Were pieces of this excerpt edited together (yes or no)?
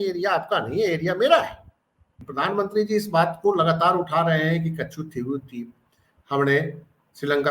yes